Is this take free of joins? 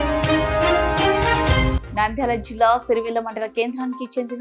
yes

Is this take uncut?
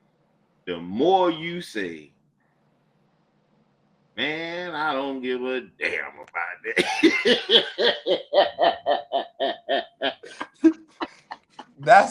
yes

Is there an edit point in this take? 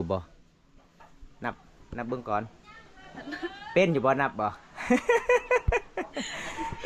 no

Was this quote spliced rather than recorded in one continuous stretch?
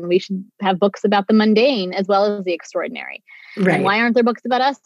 no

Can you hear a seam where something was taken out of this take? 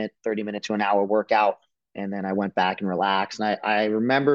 no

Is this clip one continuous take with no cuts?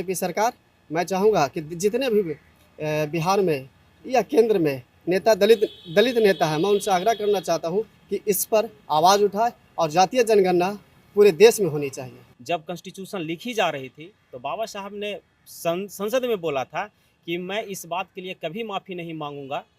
no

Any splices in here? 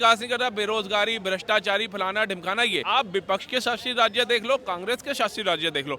yes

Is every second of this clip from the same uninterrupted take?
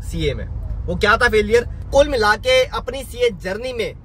no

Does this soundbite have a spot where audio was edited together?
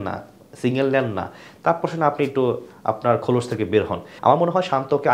yes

